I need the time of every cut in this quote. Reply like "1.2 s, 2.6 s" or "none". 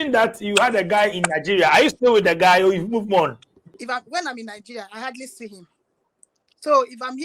3.7 s